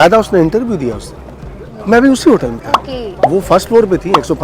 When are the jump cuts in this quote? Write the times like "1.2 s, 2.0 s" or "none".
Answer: 1.7 s